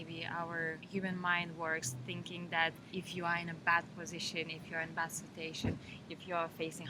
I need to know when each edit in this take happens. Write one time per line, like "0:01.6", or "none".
none